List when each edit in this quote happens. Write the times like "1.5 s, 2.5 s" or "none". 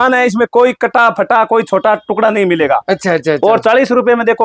none